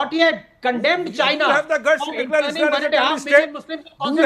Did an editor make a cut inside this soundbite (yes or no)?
no